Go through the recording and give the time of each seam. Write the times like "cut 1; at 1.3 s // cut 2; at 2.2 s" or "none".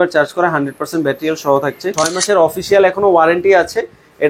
cut 1; at 2.1 s